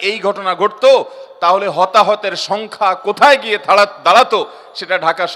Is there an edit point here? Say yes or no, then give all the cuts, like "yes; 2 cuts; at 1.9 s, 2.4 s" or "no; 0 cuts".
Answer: no; 0 cuts